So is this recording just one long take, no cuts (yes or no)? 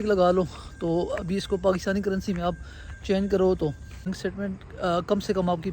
no